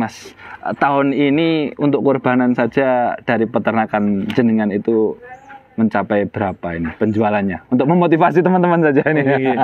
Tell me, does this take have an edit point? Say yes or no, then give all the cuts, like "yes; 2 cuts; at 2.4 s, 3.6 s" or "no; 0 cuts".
no; 0 cuts